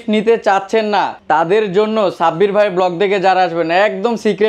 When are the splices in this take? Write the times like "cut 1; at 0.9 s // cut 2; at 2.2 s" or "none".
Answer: cut 1; at 1.2 s